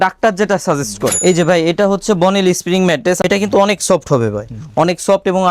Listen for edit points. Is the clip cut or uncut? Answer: cut